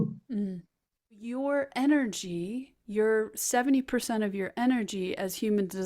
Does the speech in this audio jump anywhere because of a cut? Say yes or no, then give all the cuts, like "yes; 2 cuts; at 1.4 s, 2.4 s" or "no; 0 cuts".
yes; 1 cut; at 1.3 s